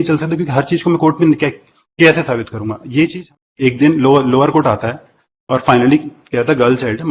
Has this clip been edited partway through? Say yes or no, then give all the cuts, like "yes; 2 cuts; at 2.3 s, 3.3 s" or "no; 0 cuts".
yes; 1 cut; at 3.2 s